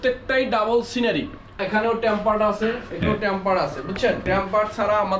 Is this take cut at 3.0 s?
yes; 3 cuts; at 1.5 s, 3.0 s, 4.2 s

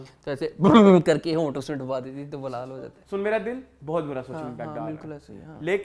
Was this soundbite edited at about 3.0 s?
yes; 1 cut; at 3.0 s

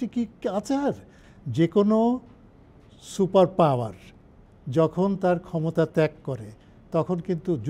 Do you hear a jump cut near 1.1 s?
yes; 1 cut; at 1.1 s

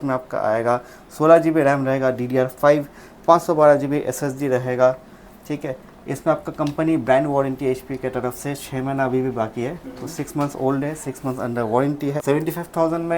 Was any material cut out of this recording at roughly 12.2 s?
yes; 1 cut; at 12.2 s

